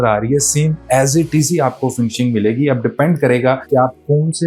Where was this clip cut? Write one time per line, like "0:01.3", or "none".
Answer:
none

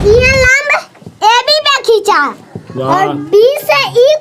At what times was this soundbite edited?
none

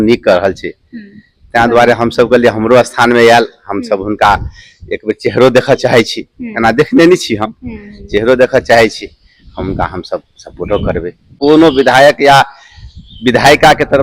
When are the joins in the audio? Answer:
0:11.4

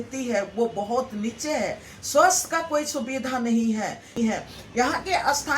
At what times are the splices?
0:04.1

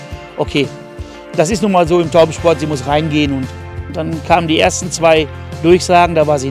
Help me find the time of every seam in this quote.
0:03.8

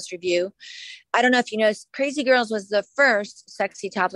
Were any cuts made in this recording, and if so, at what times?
none

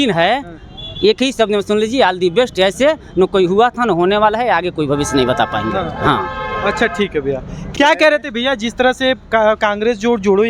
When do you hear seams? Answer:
none

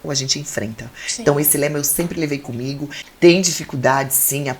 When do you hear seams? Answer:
0:02.9

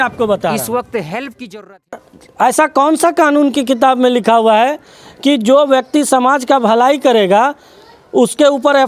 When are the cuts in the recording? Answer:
0:02.0

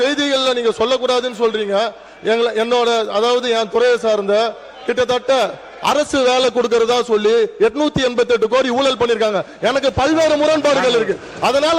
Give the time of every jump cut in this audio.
none

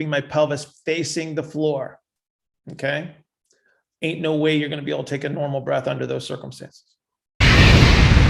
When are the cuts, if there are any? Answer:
0:07.4

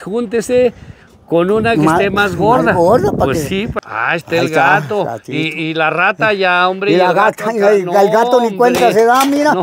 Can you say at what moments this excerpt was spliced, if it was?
0:03.8

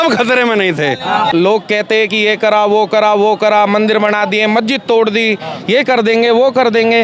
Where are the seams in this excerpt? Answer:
0:01.3

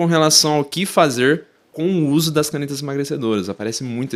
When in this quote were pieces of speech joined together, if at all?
none

